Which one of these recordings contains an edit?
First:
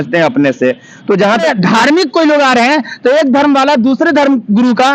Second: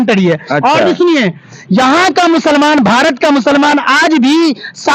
first; 1 cut; at 1.4 s

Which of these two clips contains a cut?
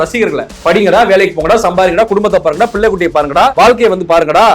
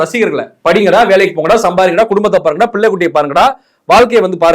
first; 1 cut; at 3.5 s

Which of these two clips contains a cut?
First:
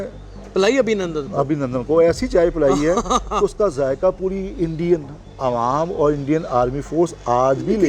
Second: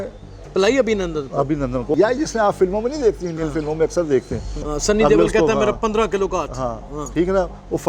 second; 2 cuts; at 1.9 s, 4.7 s

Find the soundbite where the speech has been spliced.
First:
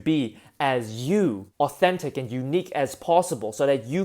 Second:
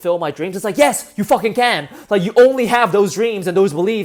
first; 1 cut; at 1.5 s

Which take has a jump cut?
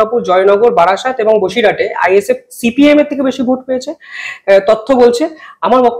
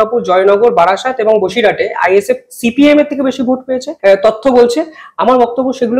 second; 1 cut; at 3.9 s

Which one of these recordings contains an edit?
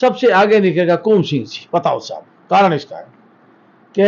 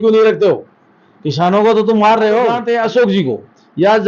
second; 1 cut; at 2.6 s

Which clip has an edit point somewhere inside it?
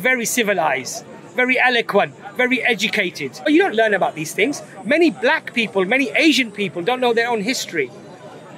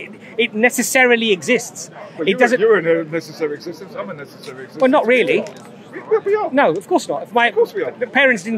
first; 1 cut; at 3.3 s

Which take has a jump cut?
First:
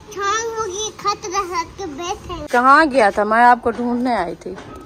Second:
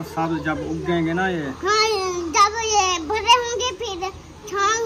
first; 1 cut; at 2.5 s

